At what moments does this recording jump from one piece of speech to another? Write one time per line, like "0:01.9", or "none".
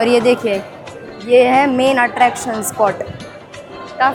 none